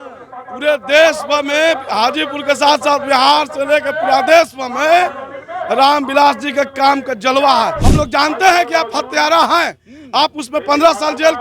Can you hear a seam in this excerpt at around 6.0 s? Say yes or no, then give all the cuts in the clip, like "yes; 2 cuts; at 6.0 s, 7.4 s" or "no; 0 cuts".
no; 1 cut; at 7.8 s